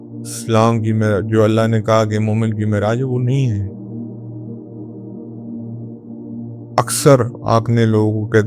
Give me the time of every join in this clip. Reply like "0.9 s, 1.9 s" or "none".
none